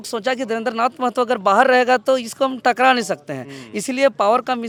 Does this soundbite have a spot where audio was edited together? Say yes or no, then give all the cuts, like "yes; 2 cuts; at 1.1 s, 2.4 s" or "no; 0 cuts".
no; 0 cuts